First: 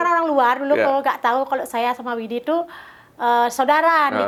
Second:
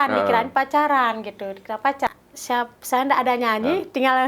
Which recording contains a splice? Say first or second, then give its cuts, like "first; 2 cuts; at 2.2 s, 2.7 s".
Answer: second; 1 cut; at 2.1 s